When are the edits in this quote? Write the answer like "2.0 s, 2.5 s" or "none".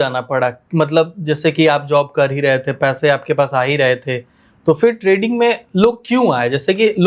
none